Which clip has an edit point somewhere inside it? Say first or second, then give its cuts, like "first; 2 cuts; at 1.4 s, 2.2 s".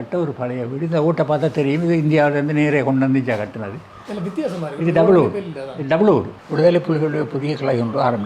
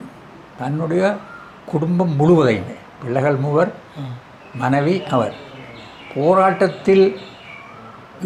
first; 1 cut; at 6.4 s